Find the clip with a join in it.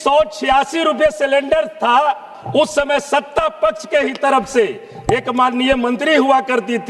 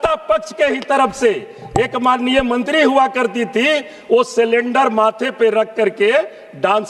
first; 1 cut; at 2.3 s

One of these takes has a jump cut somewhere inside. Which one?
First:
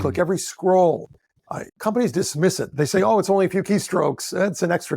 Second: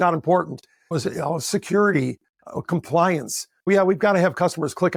first; 1 cut; at 1.7 s

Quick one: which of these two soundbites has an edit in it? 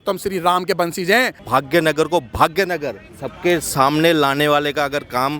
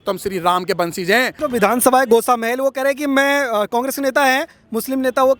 first; 1 cut; at 1.3 s

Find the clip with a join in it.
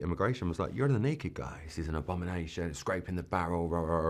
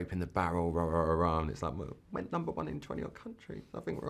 first; 1 cut; at 1.7 s

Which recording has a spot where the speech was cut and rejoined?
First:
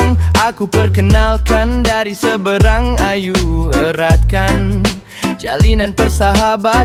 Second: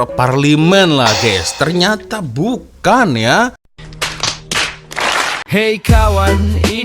second; 1 cut; at 5.4 s

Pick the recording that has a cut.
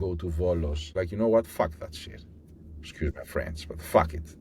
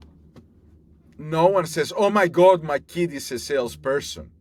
first; 1 cut; at 0.9 s

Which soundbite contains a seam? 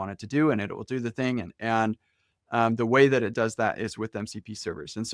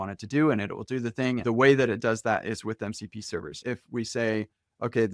second; 2 cuts; at 1.4 s, 3.6 s

